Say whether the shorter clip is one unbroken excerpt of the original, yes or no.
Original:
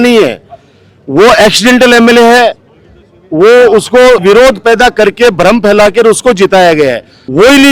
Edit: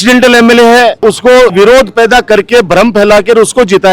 no